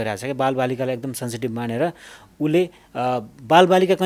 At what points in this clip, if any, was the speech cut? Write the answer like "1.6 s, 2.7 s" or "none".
none

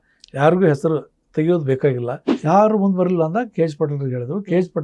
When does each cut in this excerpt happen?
2.3 s

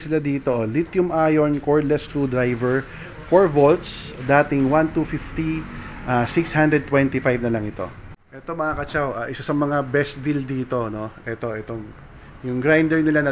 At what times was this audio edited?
8.3 s

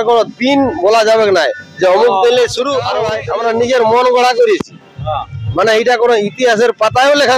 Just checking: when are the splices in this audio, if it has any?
3.1 s

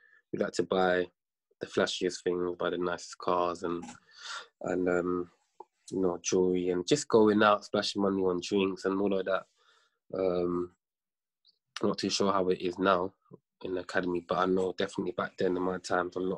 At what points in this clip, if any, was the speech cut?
none

